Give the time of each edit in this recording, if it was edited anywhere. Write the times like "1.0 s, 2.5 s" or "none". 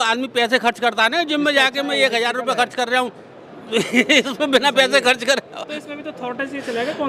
none